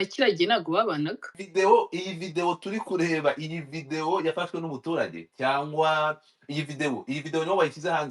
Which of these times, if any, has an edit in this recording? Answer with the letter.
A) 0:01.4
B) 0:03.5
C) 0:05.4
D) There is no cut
A